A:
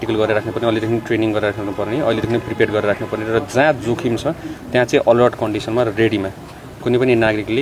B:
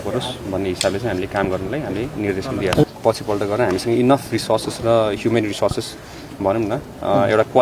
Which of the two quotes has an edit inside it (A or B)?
B